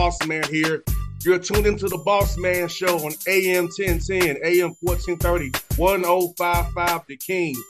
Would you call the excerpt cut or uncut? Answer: uncut